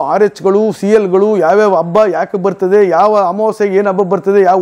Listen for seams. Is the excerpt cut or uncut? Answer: uncut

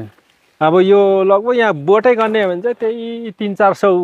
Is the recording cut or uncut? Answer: uncut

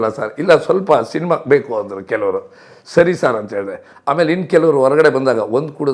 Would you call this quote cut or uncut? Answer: uncut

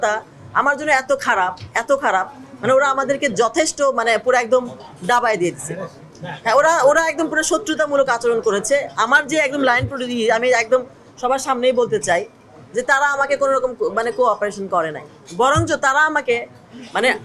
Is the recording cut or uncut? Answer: uncut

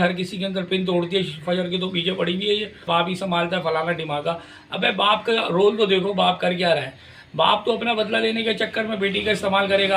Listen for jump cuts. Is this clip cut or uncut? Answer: cut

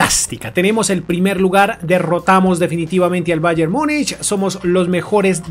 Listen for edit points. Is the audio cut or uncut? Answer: uncut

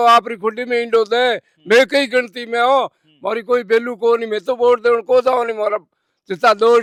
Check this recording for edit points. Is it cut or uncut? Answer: uncut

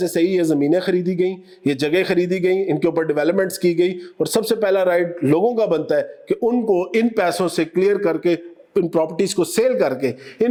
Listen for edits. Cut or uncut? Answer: uncut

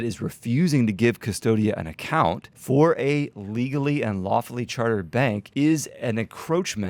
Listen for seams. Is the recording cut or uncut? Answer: cut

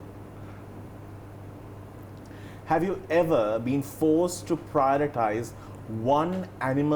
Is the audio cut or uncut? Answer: uncut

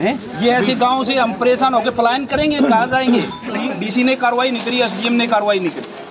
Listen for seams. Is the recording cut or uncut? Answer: cut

